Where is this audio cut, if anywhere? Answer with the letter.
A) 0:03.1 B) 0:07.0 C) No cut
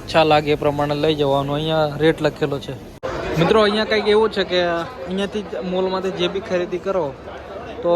A